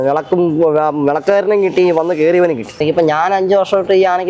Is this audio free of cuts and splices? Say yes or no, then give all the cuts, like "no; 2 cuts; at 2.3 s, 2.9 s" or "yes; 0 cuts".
no; 1 cut; at 2.8 s